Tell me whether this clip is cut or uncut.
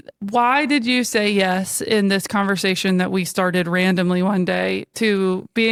uncut